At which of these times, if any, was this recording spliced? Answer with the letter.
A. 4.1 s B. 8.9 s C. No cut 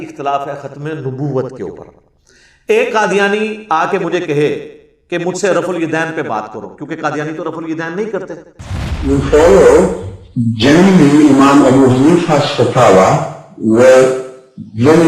B